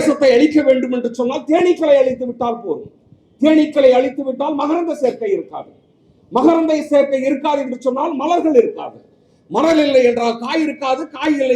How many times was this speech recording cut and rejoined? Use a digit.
0